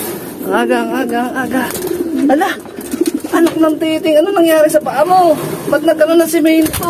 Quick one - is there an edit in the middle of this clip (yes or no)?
no